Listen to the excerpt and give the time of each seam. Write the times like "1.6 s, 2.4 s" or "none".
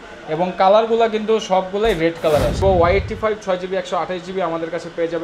2.6 s